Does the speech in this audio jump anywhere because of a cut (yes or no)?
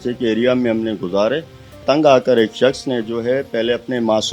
yes